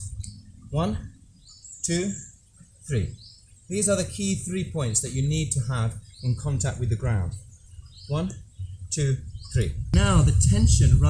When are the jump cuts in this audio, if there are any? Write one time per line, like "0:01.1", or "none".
0:09.9